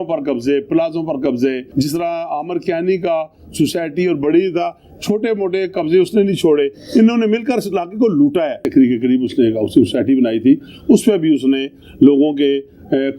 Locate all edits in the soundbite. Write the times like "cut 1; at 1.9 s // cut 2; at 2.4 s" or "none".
cut 1; at 1.6 s // cut 2; at 8.6 s

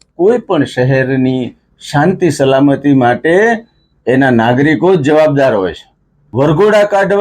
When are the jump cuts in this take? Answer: cut 1; at 6.2 s

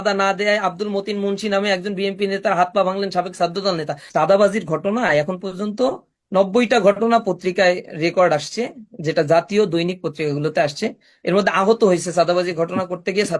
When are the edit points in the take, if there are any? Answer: cut 1; at 4.0 s

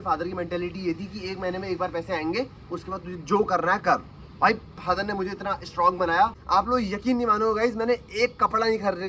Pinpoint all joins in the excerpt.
cut 1; at 6.4 s

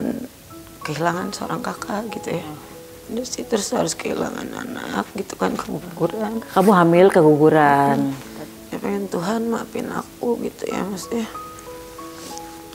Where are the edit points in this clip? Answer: cut 1; at 2.6 s // cut 2; at 8.2 s

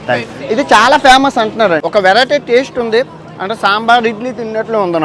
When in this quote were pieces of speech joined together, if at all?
cut 1; at 1.8 s

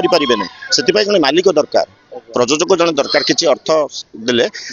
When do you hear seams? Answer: none

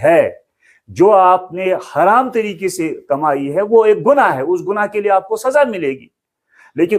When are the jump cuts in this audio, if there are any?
none

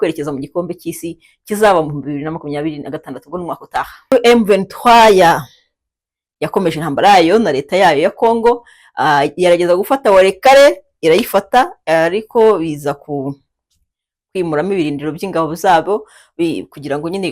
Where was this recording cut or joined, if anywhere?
cut 1; at 4.1 s

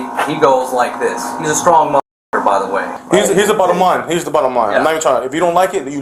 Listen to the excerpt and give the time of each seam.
cut 1; at 2.9 s

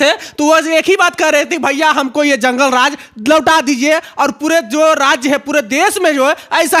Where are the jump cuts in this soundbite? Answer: none

